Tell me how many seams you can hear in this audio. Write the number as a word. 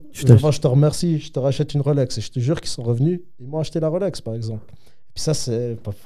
zero